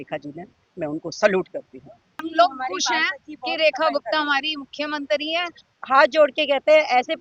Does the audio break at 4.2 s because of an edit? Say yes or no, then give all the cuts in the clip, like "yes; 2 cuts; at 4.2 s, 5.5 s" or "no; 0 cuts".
no; 2 cuts; at 2.2 s, 5.6 s